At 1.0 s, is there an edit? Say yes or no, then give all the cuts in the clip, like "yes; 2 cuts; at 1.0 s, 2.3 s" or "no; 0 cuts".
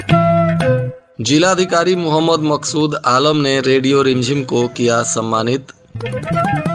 yes; 1 cut; at 1.0 s